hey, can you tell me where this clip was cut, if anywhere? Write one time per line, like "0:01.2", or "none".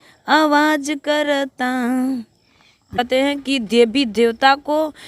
0:02.9